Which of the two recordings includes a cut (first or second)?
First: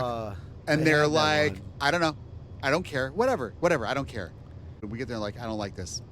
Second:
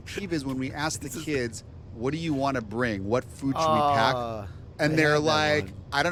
first